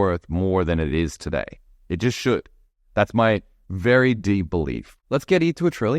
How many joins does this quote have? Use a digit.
2